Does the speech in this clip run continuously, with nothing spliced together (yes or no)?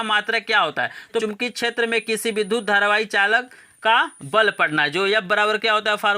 no